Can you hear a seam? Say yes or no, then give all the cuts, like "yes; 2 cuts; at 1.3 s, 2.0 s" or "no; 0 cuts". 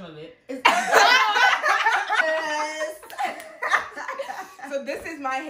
no; 0 cuts